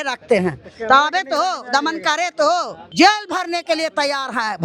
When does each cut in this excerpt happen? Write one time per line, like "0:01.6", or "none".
0:02.8